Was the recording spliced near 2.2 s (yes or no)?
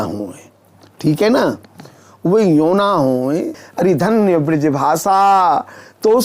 no